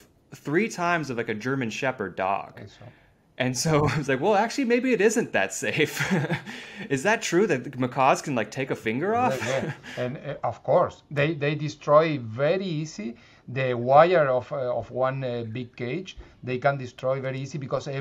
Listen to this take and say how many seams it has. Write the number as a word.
zero